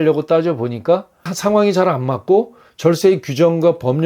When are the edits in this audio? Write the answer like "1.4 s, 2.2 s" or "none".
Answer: 1.3 s